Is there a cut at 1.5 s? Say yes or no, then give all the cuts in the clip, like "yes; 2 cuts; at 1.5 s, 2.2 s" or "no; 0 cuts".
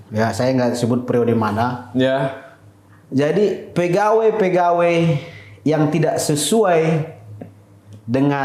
no; 0 cuts